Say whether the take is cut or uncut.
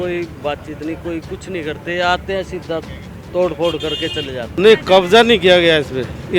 cut